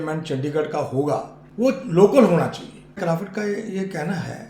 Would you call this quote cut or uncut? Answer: cut